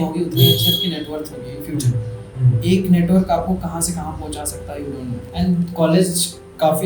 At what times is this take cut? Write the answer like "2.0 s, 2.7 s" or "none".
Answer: 5.3 s